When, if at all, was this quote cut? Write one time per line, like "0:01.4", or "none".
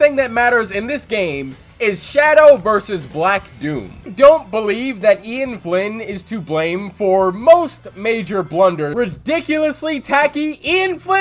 0:04.1
0:08.9